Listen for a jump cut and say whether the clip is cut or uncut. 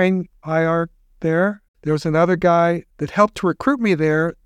uncut